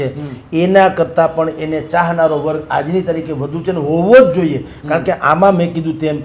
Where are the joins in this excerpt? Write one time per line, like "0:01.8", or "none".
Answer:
none